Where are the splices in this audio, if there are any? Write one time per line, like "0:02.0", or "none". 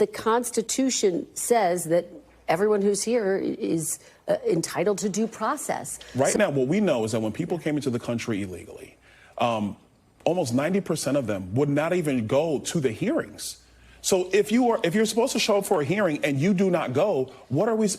0:06.0